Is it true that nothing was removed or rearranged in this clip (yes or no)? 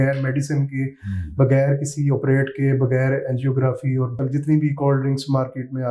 no